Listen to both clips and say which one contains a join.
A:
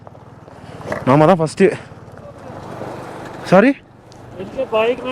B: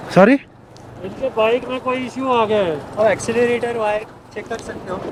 A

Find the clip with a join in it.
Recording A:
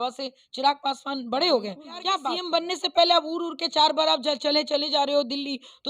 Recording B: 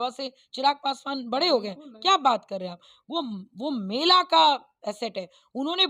A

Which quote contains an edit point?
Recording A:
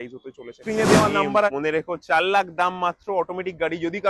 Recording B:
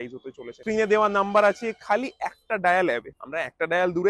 A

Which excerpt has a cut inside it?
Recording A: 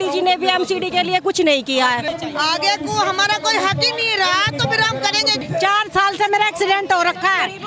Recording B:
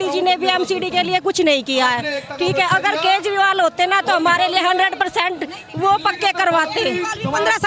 A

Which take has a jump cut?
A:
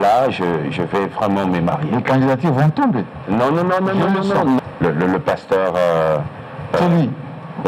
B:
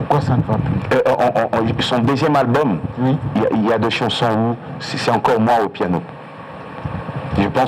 A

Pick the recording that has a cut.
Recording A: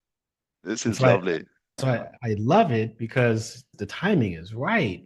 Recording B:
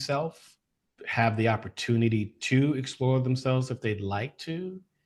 A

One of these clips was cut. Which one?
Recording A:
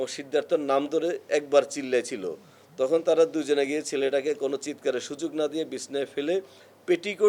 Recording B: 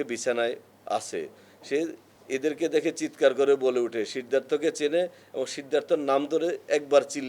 B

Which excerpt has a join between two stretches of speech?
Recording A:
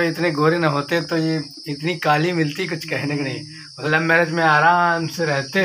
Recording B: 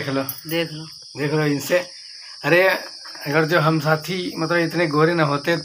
A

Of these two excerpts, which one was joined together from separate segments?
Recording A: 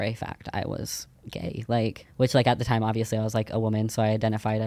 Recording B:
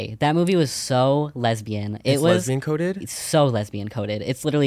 A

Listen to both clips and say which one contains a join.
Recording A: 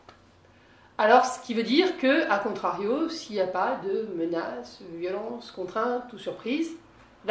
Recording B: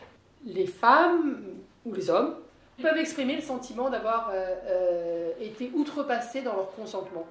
B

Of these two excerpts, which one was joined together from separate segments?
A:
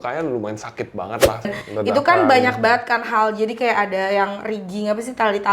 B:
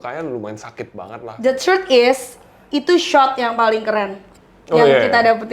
A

